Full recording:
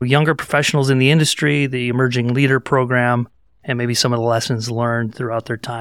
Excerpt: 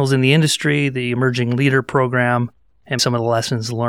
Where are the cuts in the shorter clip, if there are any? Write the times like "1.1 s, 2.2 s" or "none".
3.0 s